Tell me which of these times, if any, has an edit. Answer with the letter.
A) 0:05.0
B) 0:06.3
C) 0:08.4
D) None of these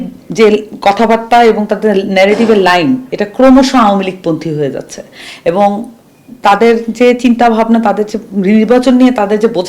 D